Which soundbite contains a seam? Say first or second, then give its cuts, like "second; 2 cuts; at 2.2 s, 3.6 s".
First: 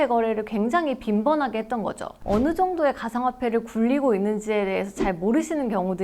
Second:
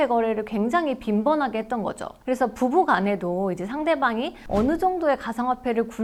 first; 1 cut; at 2.1 s